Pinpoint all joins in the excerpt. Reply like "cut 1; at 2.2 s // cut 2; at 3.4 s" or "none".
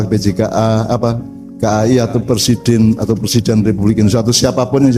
none